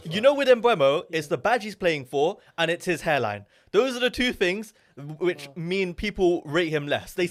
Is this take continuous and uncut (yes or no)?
yes